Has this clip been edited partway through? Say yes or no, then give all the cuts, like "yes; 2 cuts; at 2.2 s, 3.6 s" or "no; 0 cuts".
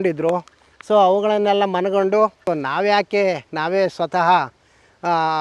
yes; 1 cut; at 2.4 s